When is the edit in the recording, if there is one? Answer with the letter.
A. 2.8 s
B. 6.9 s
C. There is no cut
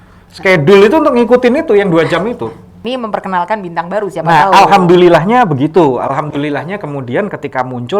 A